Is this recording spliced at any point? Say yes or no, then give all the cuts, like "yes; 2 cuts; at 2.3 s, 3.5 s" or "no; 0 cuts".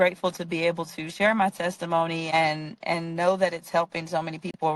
yes; 1 cut; at 2.3 s